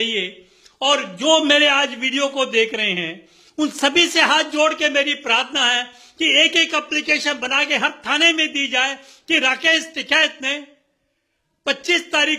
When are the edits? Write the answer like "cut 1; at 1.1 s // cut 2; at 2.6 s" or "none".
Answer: none